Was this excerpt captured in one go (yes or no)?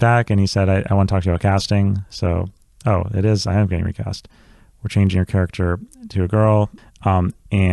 no